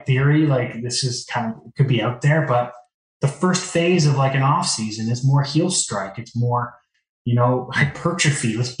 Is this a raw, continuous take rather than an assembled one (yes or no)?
yes